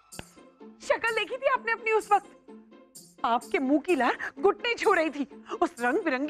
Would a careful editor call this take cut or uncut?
uncut